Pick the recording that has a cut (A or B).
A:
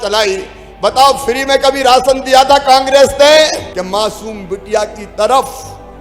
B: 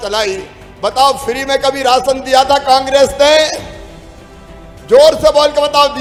A